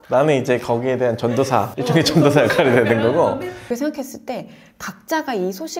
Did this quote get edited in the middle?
yes; 2 cuts; at 1.7 s, 3.6 s

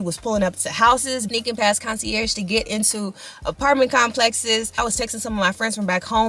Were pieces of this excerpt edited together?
no; 0 cuts

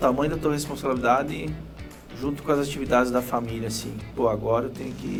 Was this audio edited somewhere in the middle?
no; 0 cuts

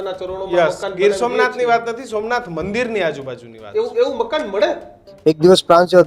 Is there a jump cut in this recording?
yes; 1 cut; at 5.1 s

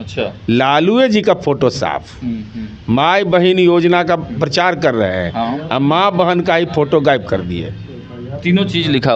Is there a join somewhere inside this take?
no; 0 cuts

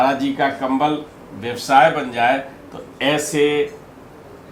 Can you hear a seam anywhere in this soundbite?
no; 0 cuts

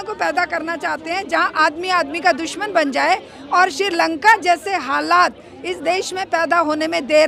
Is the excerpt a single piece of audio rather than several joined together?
yes; 0 cuts

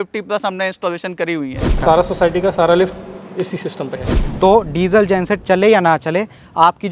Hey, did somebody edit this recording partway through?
yes; 2 cuts; at 1.7 s, 4.1 s

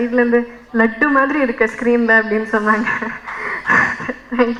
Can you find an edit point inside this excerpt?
no; 0 cuts

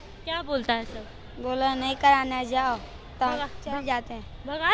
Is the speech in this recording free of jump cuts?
yes; 0 cuts

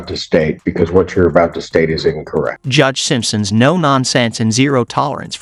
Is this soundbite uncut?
yes; 0 cuts

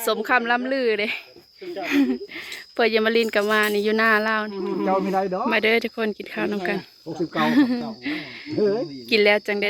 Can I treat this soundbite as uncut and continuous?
no; 1 cut; at 4.5 s

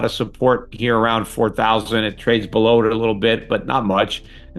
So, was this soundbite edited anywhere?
no; 0 cuts

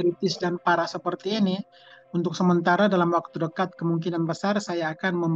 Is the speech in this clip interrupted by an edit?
no; 0 cuts

